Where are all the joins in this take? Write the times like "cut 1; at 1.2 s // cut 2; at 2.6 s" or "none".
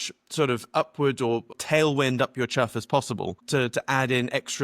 cut 1; at 1.5 s // cut 2; at 3.4 s

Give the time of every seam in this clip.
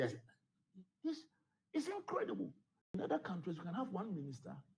cut 1; at 2.8 s

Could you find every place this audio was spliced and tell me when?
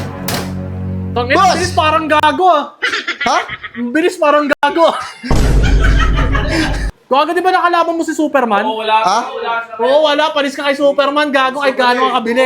cut 1; at 6.9 s

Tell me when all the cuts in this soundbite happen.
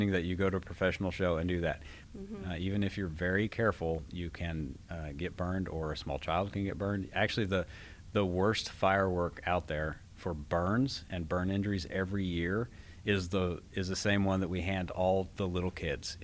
cut 1; at 2.0 s

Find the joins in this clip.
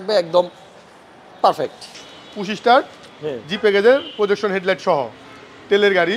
cut 1; at 1.9 s

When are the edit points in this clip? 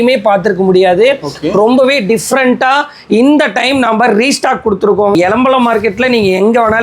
cut 1; at 5.1 s

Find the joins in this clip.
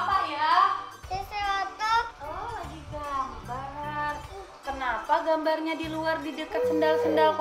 cut 1; at 0.9 s

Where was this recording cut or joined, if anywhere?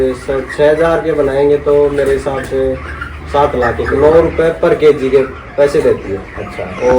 cut 1; at 3.9 s

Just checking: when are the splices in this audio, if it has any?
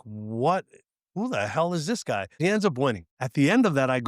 cut 1; at 2.4 s // cut 2; at 3.1 s

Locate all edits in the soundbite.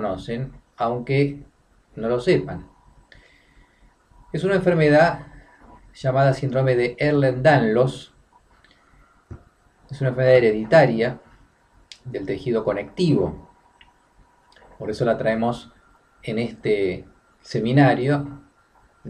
cut 1; at 10.2 s

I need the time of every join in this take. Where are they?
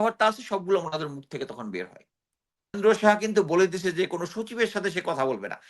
cut 1; at 2.8 s

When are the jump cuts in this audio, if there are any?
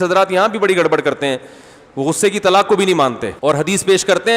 cut 1; at 3.3 s

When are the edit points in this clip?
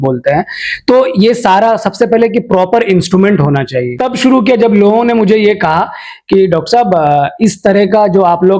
cut 1; at 4.0 s

